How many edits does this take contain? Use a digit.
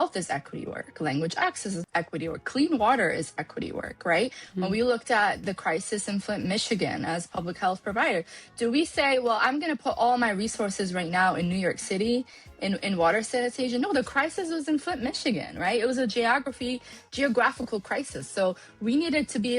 1